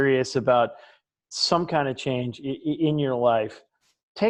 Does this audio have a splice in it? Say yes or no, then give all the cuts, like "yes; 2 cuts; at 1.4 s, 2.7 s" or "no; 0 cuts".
no; 0 cuts